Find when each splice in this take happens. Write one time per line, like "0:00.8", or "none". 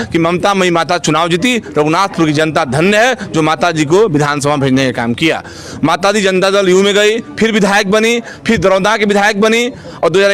none